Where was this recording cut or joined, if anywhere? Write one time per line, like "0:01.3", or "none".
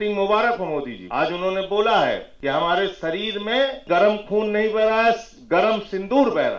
0:01.0
0:02.3
0:03.8